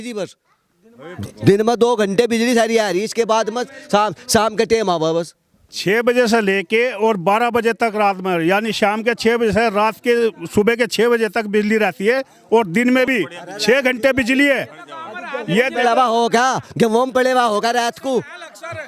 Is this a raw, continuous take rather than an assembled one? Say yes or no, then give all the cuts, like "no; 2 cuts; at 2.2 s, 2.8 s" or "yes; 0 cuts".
yes; 0 cuts